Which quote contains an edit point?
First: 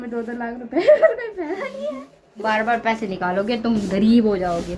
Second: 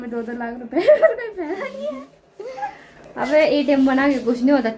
first; 1 cut; at 2.4 s

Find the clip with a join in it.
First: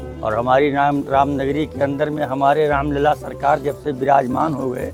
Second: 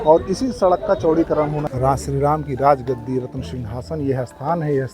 second; 1 cut; at 1.6 s

